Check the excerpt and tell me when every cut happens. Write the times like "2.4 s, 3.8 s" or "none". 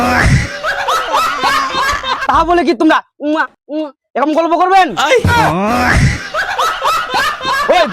1.9 s

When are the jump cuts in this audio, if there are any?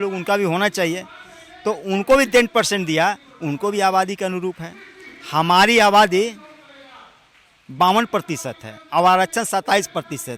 none

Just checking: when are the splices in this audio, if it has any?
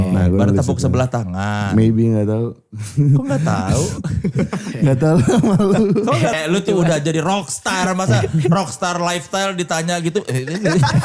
6.3 s

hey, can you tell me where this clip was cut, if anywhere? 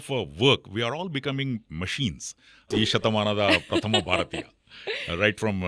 2.7 s

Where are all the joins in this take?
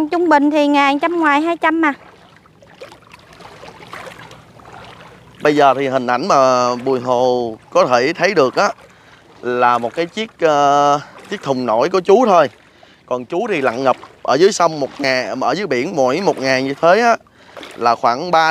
none

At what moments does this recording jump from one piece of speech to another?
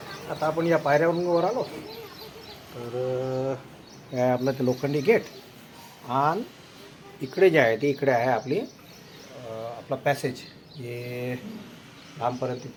none

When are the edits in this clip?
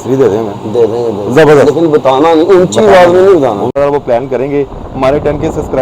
3.8 s

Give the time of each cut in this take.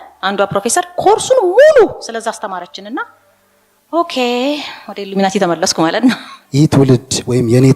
6.3 s

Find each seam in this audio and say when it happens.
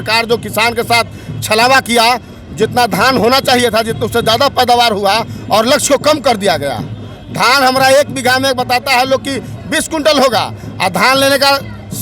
none

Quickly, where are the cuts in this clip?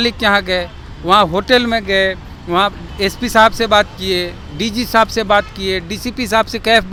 none

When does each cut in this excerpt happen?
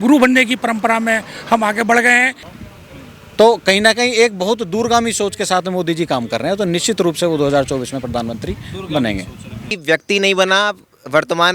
2.4 s, 9.7 s

